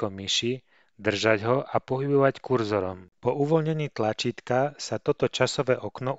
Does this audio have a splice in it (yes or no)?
yes